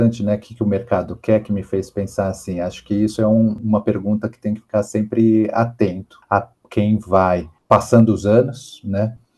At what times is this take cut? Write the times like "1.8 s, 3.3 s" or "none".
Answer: 3.6 s, 6.1 s